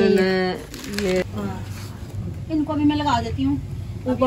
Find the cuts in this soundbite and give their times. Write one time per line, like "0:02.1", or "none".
0:01.2